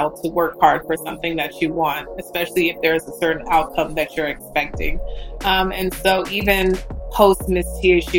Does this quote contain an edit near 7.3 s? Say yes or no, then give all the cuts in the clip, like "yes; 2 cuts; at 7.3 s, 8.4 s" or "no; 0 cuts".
no; 0 cuts